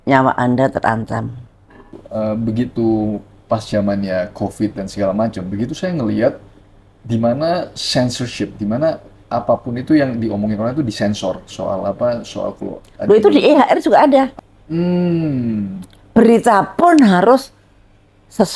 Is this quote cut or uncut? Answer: cut